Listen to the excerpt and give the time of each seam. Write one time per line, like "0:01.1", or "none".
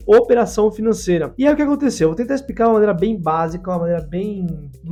none